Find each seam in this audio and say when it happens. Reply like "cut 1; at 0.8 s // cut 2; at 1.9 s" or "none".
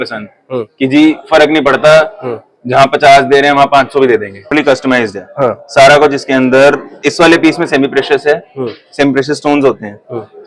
cut 1; at 4.5 s